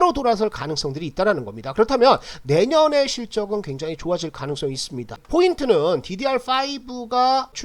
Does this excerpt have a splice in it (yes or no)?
yes